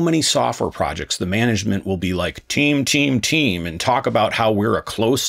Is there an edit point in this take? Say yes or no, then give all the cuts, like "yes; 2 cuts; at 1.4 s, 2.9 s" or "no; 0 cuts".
no; 0 cuts